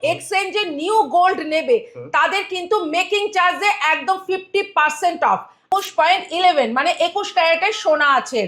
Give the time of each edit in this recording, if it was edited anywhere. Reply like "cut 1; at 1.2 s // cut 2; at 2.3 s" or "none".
cut 1; at 5.7 s

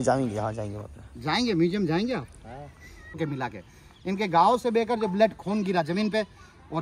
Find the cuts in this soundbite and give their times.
cut 1; at 3.2 s

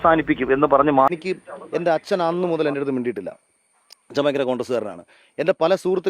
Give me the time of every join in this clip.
cut 1; at 1.1 s

